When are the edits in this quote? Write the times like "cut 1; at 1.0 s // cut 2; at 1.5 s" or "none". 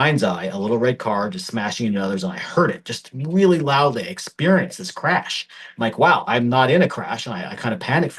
none